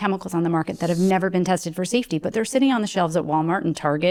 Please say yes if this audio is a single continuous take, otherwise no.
yes